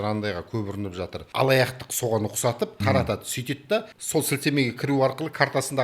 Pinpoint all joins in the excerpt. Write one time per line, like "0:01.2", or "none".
0:01.2
0:02.8
0:04.0